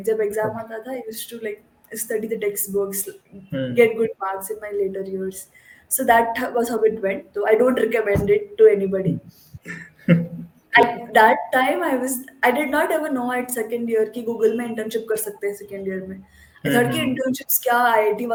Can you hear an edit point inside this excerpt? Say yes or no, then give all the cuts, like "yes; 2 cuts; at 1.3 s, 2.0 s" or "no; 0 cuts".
no; 0 cuts